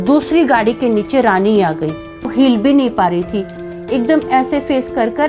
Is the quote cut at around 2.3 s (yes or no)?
yes